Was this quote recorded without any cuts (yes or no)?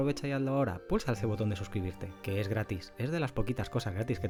yes